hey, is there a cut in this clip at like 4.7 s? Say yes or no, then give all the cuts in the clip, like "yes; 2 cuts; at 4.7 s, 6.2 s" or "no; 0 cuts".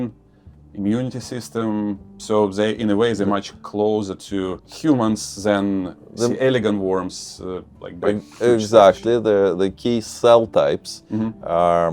yes; 1 cut; at 4.7 s